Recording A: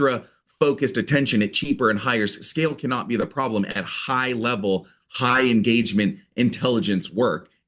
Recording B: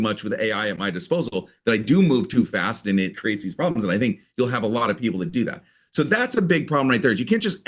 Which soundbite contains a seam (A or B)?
B